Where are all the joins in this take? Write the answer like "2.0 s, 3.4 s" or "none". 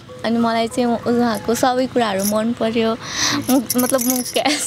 none